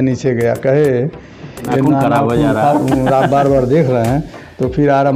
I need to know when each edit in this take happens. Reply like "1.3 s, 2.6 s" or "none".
1.7 s